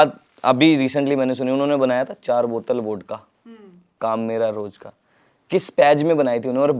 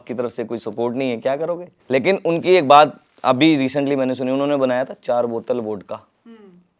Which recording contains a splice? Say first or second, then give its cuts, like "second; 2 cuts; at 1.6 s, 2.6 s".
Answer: second; 1 cut; at 1.7 s